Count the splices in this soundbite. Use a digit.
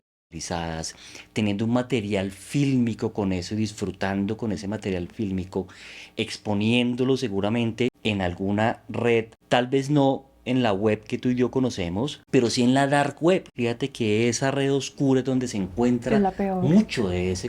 4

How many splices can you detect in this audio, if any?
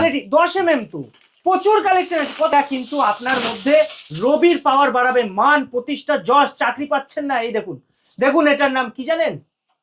1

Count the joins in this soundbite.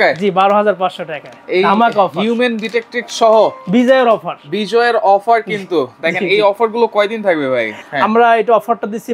1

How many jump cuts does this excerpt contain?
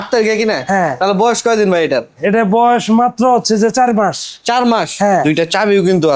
1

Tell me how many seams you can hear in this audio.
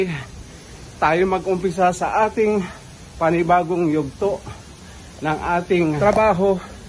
1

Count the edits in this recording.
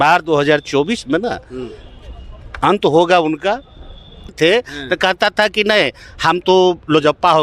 1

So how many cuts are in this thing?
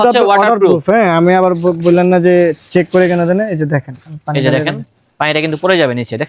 0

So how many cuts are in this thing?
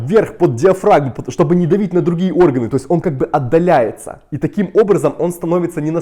0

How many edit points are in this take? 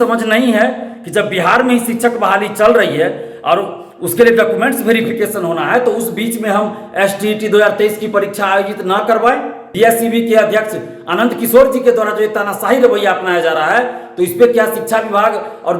1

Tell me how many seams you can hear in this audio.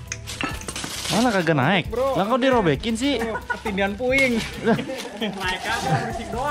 0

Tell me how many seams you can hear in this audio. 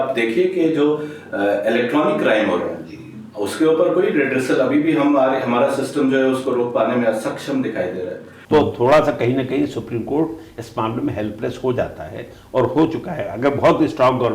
1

